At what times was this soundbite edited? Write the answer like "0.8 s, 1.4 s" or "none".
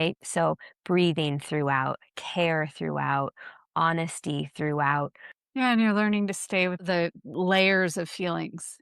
5.3 s, 6.8 s

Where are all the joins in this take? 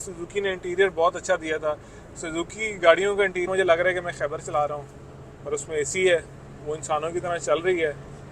3.5 s

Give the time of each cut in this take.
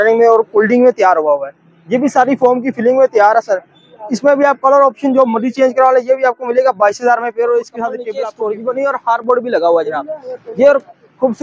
8.1 s

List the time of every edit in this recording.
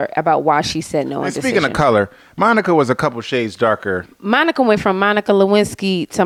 none

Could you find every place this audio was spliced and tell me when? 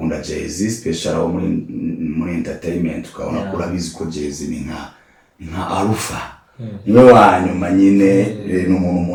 none

